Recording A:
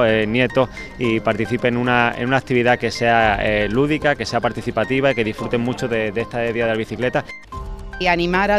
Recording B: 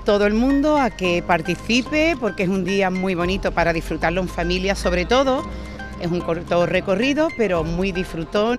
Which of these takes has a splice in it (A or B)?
A